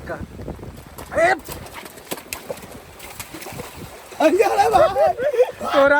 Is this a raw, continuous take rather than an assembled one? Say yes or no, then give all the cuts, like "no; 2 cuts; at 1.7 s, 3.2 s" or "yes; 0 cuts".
yes; 0 cuts